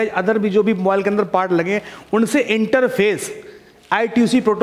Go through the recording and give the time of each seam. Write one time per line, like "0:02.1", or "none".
none